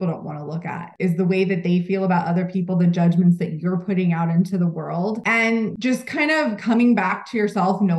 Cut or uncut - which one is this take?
cut